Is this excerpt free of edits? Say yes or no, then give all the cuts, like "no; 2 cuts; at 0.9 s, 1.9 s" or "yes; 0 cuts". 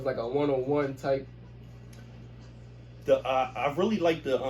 yes; 0 cuts